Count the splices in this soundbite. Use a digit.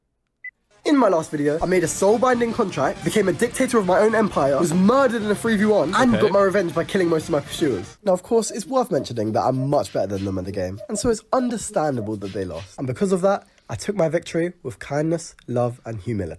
3